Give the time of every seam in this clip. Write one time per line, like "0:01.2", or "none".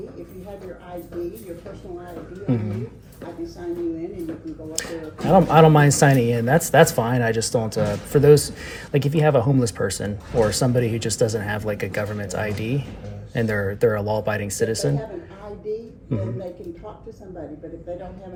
none